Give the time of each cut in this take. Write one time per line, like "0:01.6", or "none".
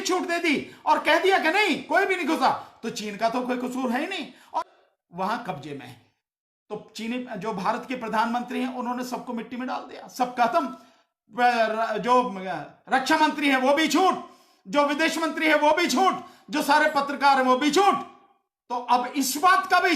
0:04.6